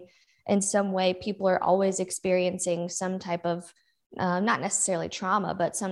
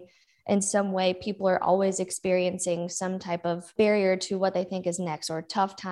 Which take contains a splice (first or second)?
second